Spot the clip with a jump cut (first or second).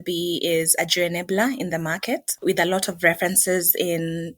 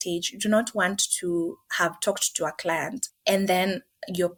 first